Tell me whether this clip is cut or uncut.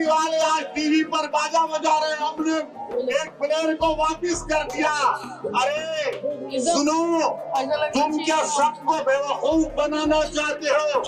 uncut